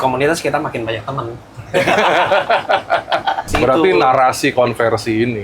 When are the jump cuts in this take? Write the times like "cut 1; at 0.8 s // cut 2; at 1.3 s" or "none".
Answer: cut 1; at 3.5 s